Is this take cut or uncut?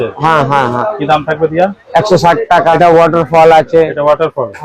cut